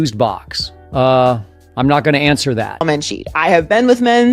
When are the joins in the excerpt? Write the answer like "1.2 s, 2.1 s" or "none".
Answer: 2.9 s